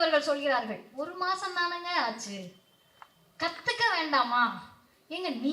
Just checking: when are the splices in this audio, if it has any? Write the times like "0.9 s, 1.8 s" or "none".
none